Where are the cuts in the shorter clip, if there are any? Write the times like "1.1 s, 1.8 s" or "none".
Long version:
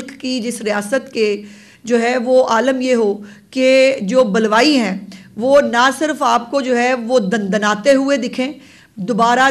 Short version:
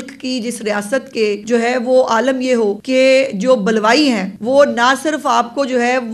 1.4 s, 2.8 s, 4.3 s